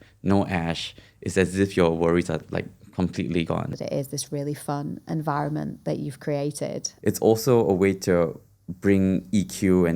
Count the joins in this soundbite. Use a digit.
2